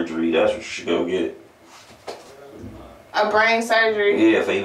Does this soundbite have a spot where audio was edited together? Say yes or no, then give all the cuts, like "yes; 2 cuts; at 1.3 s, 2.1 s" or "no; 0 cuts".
no; 0 cuts